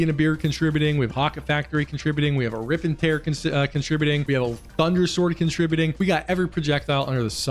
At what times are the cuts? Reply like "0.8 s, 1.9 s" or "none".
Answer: 1.1 s, 4.2 s, 5.9 s